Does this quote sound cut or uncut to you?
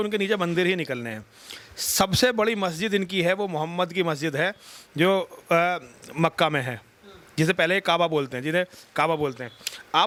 uncut